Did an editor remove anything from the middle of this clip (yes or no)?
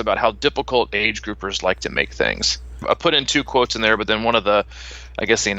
yes